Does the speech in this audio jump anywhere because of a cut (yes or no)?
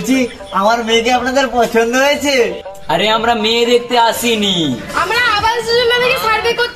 no